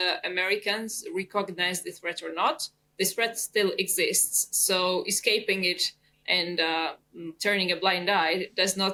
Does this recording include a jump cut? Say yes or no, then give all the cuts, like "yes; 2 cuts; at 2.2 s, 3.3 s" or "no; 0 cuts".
no; 0 cuts